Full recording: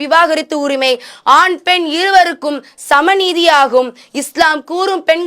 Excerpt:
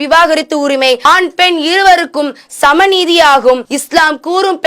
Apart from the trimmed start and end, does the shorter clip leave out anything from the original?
yes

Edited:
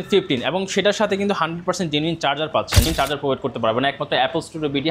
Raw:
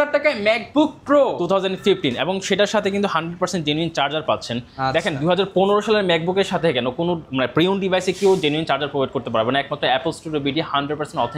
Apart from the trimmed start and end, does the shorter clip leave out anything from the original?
yes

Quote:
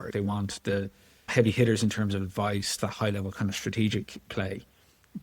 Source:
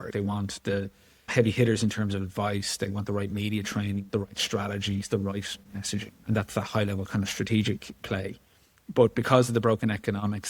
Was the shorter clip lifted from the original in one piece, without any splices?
no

